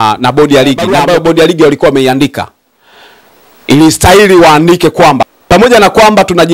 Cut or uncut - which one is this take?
cut